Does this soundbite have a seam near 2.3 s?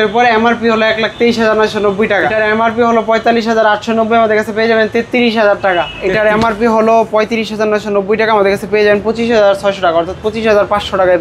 yes; 2 cuts; at 2.3 s, 6.0 s

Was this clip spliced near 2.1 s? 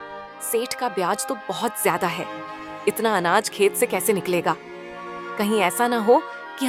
no; 0 cuts

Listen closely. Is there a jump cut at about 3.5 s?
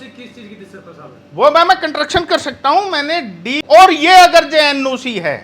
yes; 1 cut; at 3.5 s

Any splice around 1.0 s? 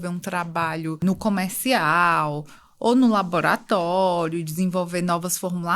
yes; 1 cut; at 1.0 s

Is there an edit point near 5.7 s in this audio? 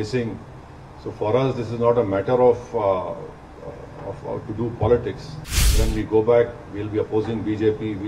yes; 1 cut; at 5.7 s

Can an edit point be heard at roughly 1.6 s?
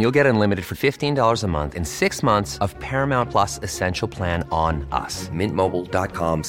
no; 0 cuts

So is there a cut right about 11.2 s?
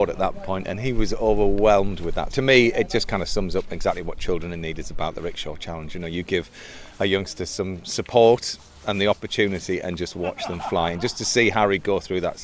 no; 1 cut; at 2.3 s

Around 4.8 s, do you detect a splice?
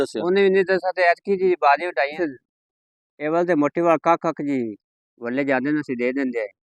no; 1 cut; at 2.1 s

